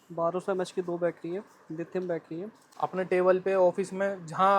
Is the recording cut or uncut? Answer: cut